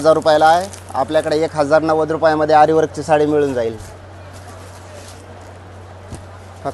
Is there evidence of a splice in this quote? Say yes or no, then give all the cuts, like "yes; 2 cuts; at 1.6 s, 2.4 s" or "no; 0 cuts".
no; 0 cuts